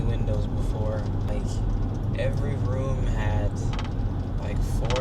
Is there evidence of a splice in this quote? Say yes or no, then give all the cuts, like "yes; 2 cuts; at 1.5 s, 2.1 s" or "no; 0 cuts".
yes; 1 cut; at 1.3 s